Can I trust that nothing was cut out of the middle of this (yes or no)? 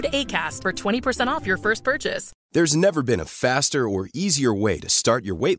no